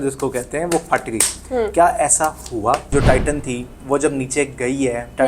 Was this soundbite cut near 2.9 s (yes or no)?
yes